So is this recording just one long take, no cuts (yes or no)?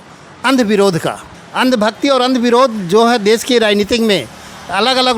yes